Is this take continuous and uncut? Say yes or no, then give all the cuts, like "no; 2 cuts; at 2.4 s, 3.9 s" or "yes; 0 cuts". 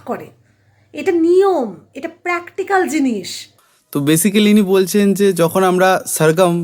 yes; 0 cuts